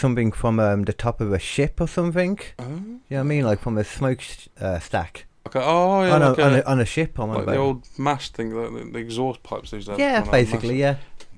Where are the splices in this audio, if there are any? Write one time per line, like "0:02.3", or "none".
0:05.5